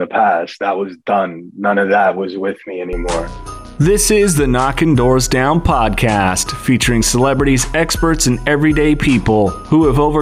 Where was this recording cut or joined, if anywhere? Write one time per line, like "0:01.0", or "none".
0:03.7